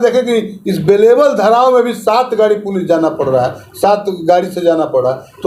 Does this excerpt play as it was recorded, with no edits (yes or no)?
yes